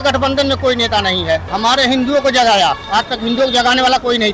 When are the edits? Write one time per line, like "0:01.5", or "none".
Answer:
none